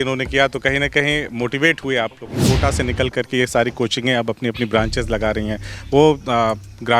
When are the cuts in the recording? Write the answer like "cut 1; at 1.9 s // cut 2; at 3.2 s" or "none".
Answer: cut 1; at 2.4 s